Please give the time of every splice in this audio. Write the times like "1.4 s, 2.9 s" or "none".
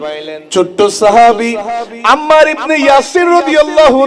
none